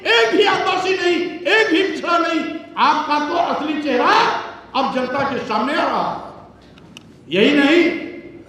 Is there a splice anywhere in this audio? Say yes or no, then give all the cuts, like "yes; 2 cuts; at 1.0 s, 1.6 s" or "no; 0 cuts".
no; 0 cuts